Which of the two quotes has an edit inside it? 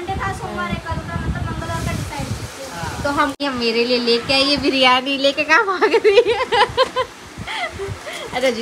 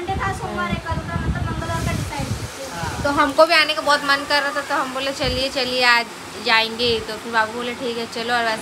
first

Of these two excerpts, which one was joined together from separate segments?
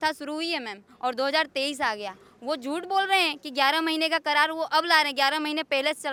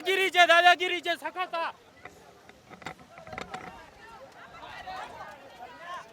second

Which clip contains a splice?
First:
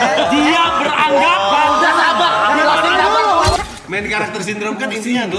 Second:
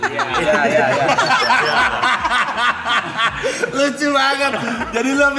first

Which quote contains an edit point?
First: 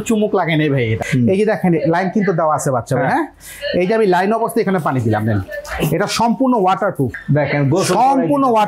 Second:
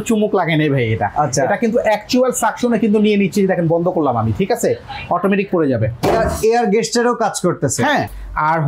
first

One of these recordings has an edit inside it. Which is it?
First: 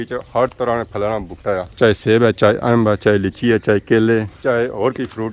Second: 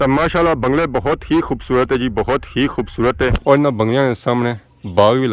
second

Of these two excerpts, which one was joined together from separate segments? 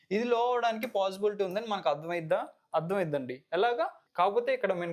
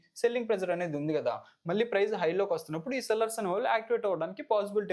first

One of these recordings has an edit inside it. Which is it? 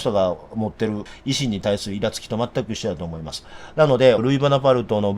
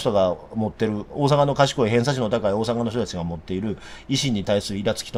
first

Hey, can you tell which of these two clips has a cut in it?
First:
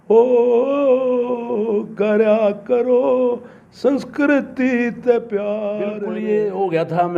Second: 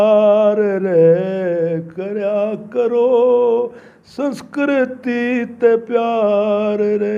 first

